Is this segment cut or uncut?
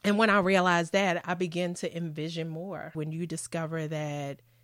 cut